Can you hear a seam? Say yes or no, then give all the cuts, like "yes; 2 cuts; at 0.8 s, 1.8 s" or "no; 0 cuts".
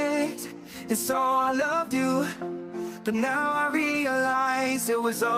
no; 0 cuts